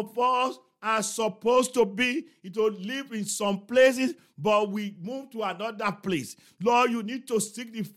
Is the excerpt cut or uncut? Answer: uncut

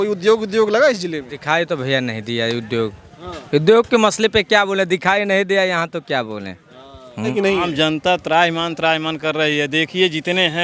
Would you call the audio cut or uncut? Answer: cut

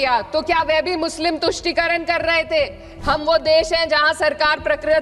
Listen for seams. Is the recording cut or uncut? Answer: cut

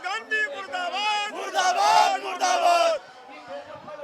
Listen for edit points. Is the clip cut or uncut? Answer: uncut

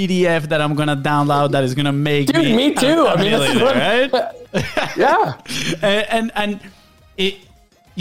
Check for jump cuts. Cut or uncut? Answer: uncut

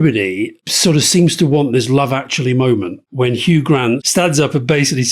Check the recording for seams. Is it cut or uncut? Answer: cut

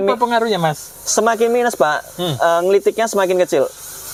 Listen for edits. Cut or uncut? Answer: uncut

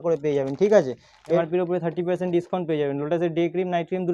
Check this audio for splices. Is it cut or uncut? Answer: cut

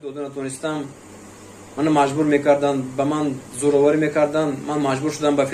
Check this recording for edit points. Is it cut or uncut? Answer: uncut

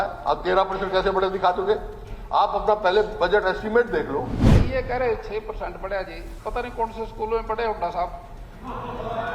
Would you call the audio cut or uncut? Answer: cut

